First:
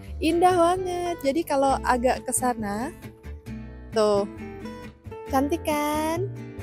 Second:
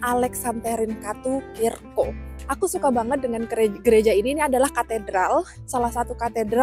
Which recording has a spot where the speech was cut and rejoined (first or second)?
second